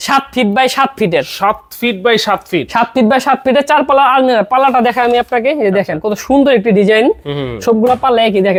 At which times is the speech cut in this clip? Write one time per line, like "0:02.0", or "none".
none